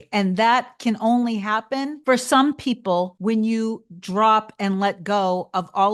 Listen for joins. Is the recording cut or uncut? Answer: uncut